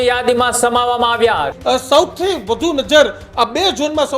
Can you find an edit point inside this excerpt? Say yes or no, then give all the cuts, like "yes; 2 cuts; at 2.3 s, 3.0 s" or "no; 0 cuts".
yes; 1 cut; at 1.5 s